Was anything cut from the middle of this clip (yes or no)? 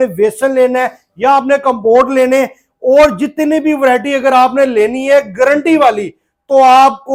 no